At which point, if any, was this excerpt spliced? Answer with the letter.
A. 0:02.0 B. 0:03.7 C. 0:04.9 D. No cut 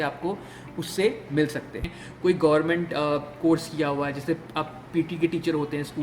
A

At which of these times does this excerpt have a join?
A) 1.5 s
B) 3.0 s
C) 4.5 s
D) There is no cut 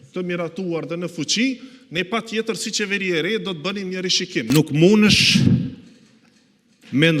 C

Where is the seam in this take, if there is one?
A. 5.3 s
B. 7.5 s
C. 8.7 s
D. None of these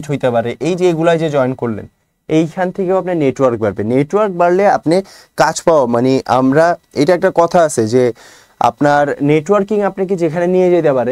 D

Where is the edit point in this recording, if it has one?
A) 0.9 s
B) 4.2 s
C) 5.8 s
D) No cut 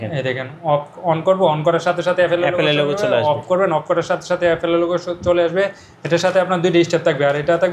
D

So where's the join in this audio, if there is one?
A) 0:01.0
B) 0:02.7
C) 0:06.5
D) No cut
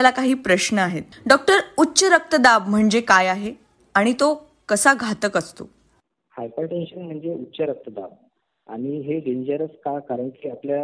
A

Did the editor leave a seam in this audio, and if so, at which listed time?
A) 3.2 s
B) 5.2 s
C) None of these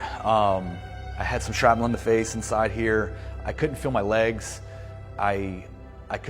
A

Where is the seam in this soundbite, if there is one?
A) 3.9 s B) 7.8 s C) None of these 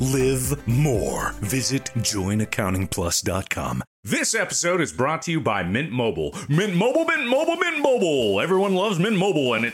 A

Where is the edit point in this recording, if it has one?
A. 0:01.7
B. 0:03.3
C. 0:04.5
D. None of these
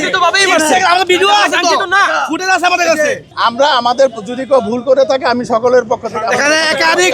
B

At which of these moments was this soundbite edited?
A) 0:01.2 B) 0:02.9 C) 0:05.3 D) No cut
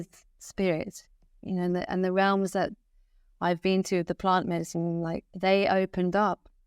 C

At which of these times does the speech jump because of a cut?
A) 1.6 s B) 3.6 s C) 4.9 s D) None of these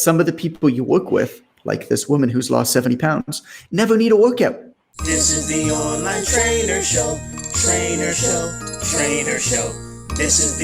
C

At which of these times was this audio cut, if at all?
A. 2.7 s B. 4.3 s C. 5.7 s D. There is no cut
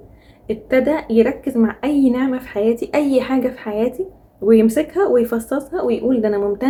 D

